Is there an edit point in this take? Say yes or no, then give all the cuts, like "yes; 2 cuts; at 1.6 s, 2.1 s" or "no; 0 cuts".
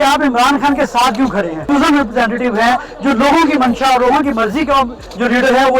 yes; 1 cut; at 1.6 s